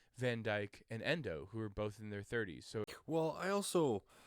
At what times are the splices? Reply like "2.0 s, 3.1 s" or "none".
2.9 s